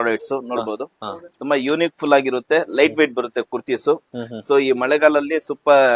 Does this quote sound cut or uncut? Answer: uncut